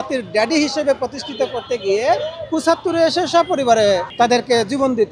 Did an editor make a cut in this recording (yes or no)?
yes